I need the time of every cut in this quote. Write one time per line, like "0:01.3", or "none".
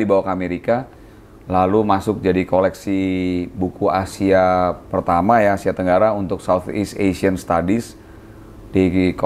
none